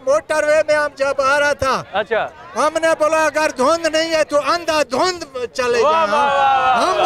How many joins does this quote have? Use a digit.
0